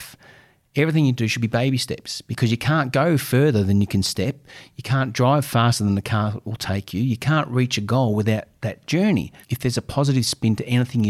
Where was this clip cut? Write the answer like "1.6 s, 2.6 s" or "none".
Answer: 9.4 s

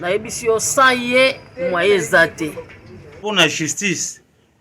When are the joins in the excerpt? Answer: 3.2 s

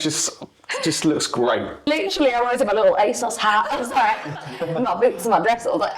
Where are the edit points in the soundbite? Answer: 1.9 s

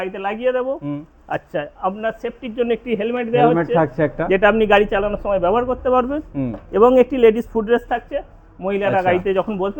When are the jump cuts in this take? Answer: none

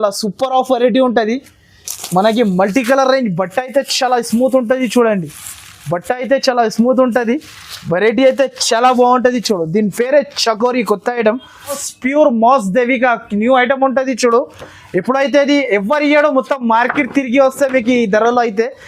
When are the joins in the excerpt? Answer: 11.9 s

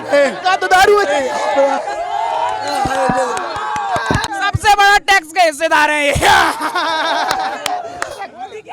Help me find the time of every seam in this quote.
none

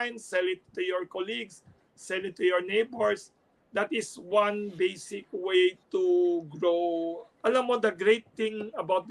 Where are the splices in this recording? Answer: 7.2 s

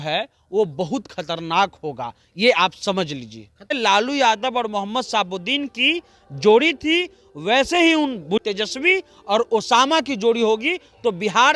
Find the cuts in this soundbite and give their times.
3.7 s, 8.4 s

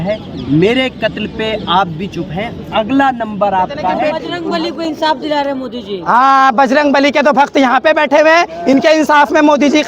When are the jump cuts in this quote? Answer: 4.2 s

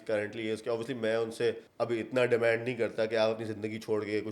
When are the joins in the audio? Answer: 1.7 s

